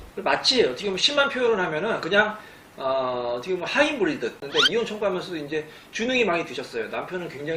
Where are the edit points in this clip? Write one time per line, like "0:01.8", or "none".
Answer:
0:04.4